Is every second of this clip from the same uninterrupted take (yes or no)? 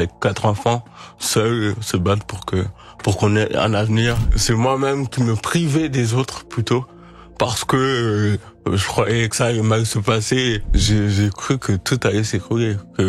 no